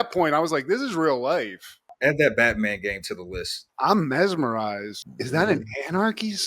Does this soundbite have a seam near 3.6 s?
yes; 1 cut; at 3.6 s

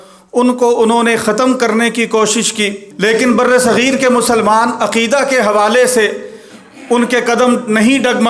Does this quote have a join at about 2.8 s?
yes; 1 cut; at 2.8 s

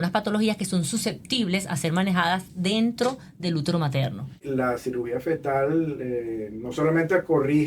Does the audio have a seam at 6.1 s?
no; 1 cut; at 4.4 s

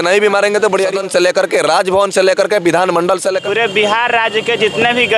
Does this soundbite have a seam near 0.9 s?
yes; 2 cuts; at 0.9 s, 3.4 s

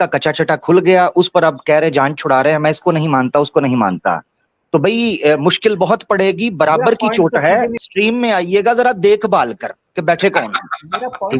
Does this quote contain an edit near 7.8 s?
yes; 1 cut; at 7.8 s

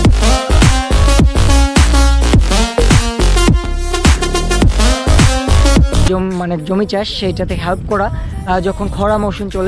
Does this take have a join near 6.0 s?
yes; 1 cut; at 6.0 s

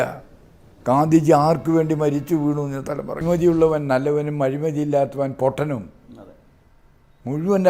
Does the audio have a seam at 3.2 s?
yes; 1 cut; at 3.2 s

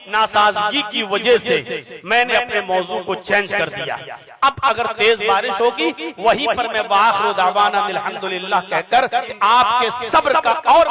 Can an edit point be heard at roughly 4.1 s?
no; 1 cut; at 9.3 s

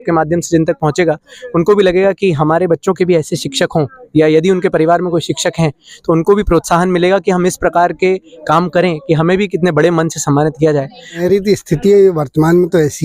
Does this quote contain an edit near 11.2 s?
yes; 1 cut; at 11.2 s

